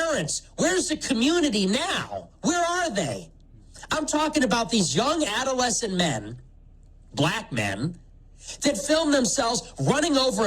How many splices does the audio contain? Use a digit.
1